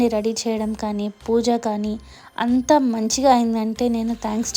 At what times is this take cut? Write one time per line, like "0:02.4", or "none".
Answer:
none